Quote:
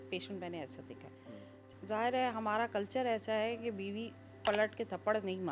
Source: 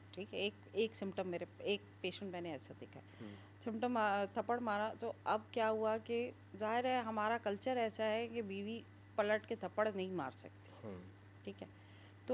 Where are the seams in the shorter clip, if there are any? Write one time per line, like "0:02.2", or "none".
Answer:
0:01.7